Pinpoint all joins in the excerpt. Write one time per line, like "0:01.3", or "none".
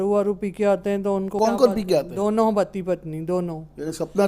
0:01.3